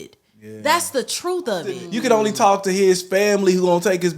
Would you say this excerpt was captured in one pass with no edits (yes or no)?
no